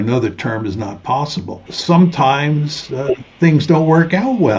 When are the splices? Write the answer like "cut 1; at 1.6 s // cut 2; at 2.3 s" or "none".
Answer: cut 1; at 1.7 s

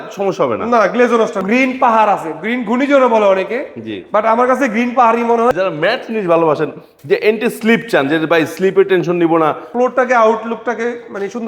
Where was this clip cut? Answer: cut 1; at 1.4 s // cut 2; at 5.5 s // cut 3; at 9.7 s

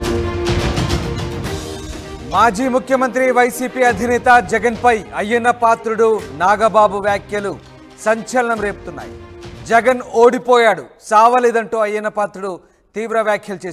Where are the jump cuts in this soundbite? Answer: cut 1; at 1.0 s

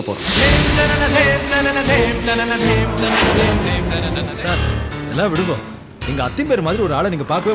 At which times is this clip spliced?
cut 1; at 4.4 s

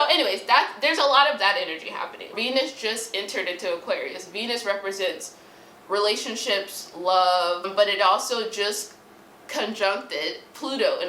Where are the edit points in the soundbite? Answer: cut 1; at 2.4 s // cut 2; at 7.7 s

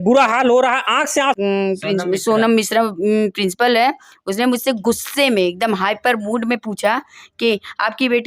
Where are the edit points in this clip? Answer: cut 1; at 1.4 s

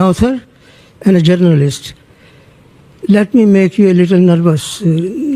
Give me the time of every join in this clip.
none

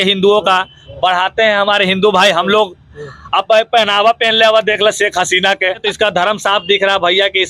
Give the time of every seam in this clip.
cut 1; at 5.8 s

